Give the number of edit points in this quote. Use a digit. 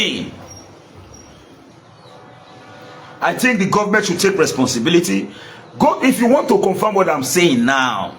1